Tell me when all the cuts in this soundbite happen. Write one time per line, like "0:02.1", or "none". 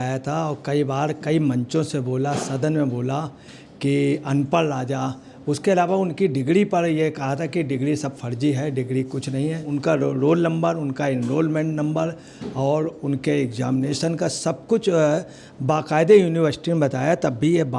0:09.7